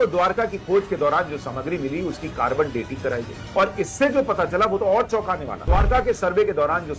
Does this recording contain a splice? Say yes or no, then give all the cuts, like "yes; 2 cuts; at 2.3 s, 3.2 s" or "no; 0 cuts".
yes; 1 cut; at 5.6 s